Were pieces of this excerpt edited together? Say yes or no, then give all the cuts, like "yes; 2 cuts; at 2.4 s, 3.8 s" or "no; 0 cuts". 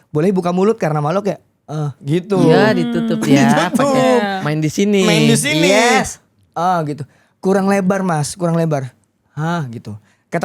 no; 0 cuts